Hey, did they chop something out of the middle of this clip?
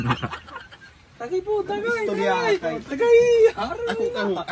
yes; 1 cut; at 1.0 s

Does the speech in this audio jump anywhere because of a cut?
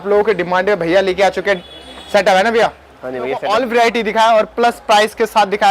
yes; 1 cut; at 3.4 s

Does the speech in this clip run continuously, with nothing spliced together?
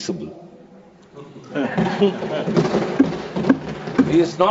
yes; 0 cuts

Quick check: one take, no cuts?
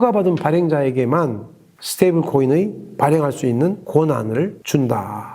no; 1 cut; at 4.0 s

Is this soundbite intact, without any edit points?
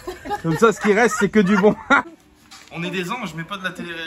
no; 1 cut; at 2.1 s

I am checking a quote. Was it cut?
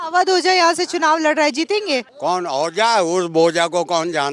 yes; 1 cut; at 2.1 s

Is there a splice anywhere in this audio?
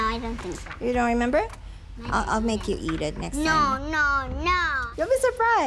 yes; 1 cut; at 4.7 s

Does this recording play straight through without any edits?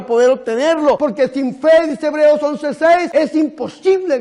no; 2 cuts; at 1.0 s, 3.1 s

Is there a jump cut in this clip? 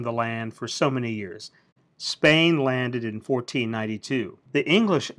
yes; 1 cut; at 4.1 s

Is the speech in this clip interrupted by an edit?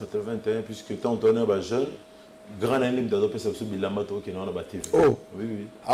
no; 0 cuts

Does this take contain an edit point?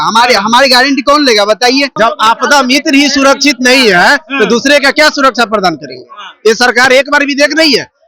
yes; 1 cut; at 1.9 s

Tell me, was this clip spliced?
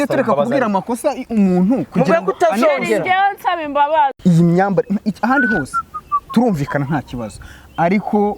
yes; 1 cut; at 4.2 s

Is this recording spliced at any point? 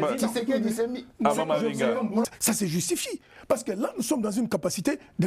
yes; 1 cut; at 2.3 s

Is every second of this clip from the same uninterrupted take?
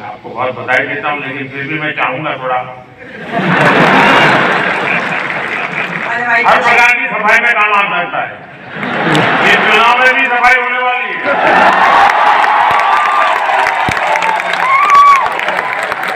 no; 1 cut; at 6.0 s

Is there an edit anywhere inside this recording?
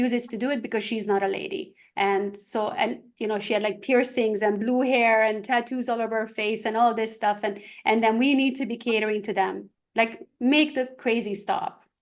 no; 0 cuts

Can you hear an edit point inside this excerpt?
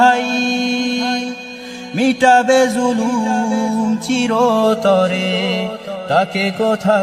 no; 0 cuts

